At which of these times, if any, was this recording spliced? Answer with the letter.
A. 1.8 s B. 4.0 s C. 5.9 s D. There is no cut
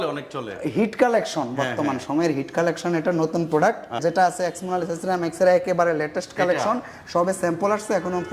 B